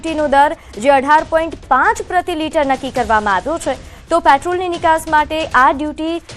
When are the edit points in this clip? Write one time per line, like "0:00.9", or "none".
none

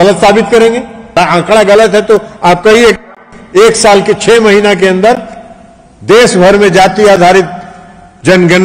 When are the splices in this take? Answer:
0:01.1

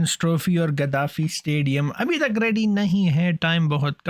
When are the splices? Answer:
none

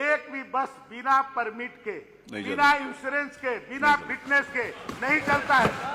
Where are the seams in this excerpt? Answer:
none

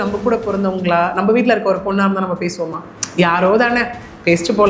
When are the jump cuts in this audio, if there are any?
none

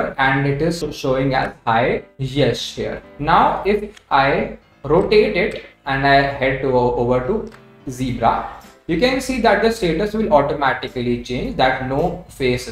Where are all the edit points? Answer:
0:03.0

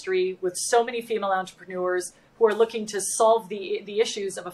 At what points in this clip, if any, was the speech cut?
none

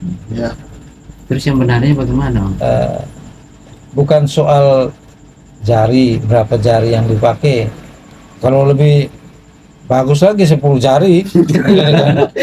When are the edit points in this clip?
0:02.6

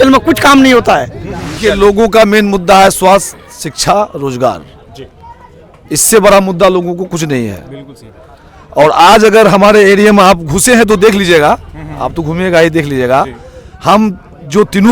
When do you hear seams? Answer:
0:01.5

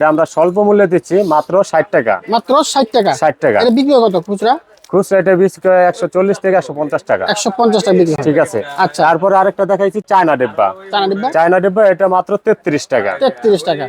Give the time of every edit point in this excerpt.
none

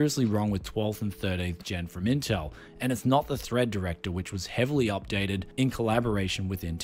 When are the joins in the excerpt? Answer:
none

